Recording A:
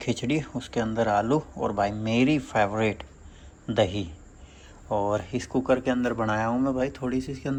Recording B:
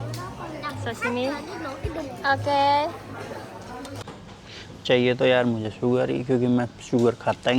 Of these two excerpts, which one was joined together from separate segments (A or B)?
B